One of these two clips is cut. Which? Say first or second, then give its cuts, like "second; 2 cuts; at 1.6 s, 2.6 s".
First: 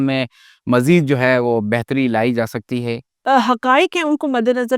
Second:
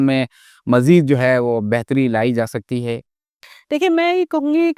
first; 1 cut; at 3.1 s